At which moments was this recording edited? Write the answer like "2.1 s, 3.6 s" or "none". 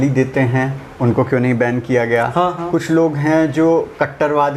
none